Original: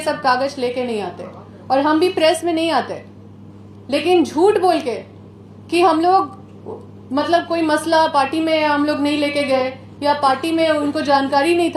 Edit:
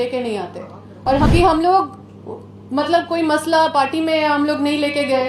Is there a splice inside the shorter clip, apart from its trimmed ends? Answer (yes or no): yes